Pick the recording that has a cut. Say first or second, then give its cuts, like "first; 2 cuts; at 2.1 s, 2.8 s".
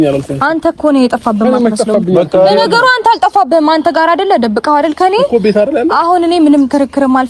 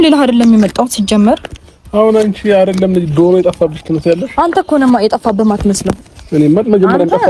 first; 1 cut; at 1.1 s